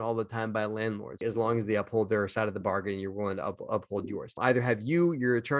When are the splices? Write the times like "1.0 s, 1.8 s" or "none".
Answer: 1.2 s, 4.3 s